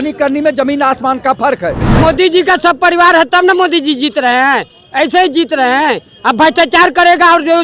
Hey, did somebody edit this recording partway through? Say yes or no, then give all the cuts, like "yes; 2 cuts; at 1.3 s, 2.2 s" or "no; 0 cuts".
yes; 1 cut; at 1.8 s